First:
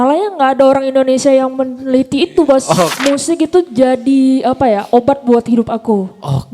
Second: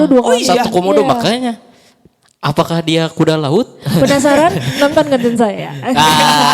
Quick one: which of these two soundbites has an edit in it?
first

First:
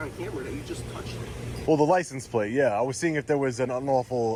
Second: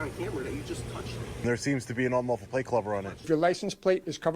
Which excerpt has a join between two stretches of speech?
second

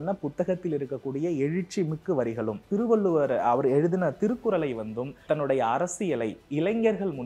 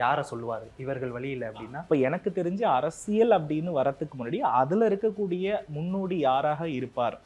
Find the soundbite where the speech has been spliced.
first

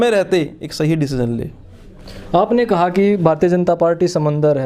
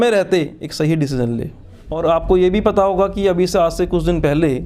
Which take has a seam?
second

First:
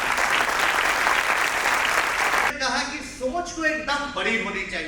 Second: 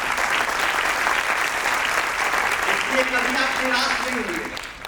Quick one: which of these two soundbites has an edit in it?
first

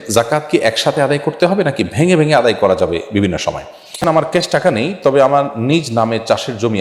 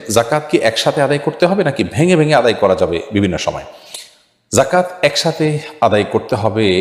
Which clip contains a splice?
first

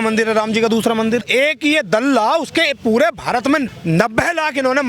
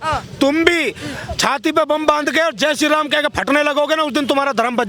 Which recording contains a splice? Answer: first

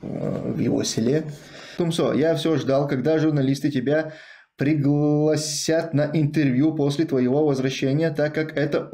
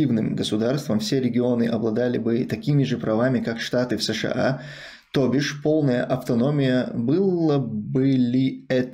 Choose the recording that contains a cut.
first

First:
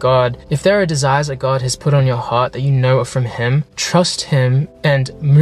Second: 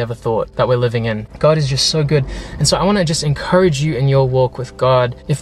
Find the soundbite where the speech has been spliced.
second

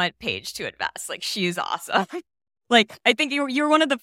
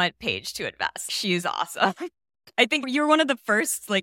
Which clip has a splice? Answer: second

